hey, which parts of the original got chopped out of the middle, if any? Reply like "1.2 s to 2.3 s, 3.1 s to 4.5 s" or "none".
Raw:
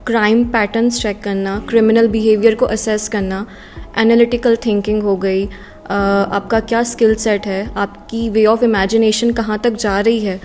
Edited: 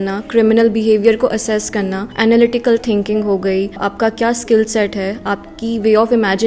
3.4 s to 3.8 s, 5.6 s to 6.4 s